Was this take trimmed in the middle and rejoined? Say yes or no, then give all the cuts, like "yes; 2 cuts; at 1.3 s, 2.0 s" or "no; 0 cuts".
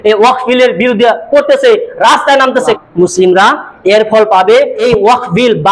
yes; 2 cuts; at 2.8 s, 4.8 s